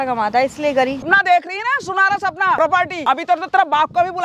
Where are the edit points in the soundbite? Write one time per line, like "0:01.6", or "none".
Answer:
0:01.0
0:02.7

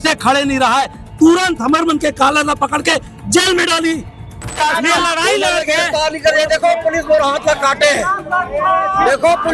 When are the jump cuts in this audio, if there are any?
0:04.6

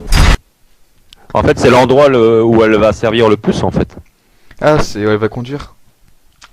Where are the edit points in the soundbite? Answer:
0:03.6

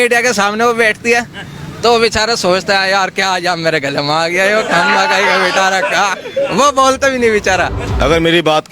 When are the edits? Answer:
0:07.8

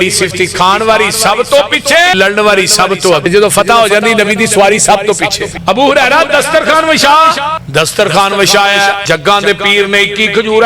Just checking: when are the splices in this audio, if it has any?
0:02.1
0:03.3
0:05.5
0:07.6
0:09.0

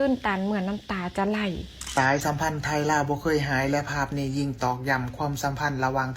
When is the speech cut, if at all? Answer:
0:01.7

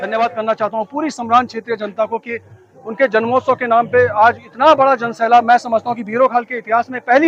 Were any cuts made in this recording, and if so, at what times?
none

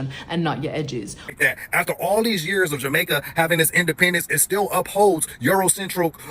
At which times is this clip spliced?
0:01.3

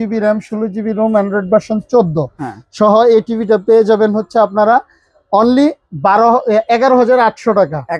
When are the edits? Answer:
none

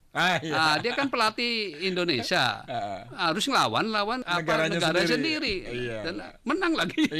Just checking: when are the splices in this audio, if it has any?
0:04.2

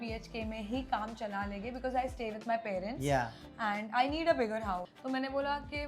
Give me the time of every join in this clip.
0:04.9

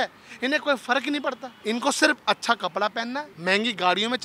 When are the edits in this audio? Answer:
0:01.5
0:03.3

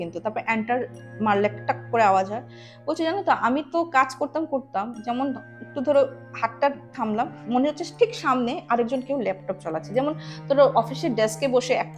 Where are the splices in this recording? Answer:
none

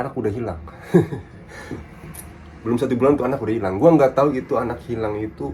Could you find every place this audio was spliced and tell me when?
none

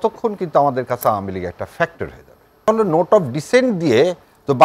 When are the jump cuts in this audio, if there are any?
0:02.7

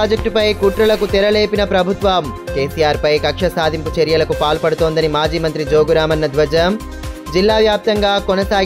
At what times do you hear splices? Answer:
none

